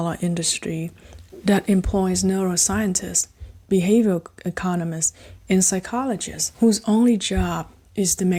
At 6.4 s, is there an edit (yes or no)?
no